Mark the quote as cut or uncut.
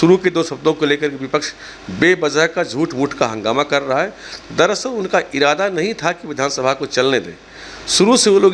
uncut